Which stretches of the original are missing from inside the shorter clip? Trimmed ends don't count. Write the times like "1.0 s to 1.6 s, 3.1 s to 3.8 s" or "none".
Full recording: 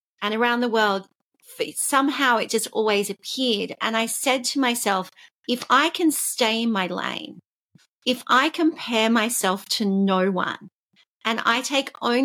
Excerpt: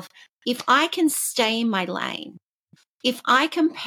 none